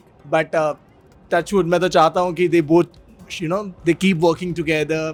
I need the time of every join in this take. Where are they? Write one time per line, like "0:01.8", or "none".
none